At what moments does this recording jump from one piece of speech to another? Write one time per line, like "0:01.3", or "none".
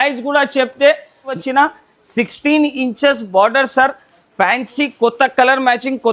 0:01.4